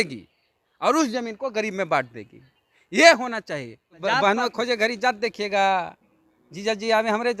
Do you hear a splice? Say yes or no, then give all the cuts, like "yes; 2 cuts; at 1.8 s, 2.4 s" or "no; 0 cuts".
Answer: yes; 1 cut; at 3.9 s